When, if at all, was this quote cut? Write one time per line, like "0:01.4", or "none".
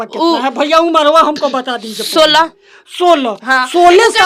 none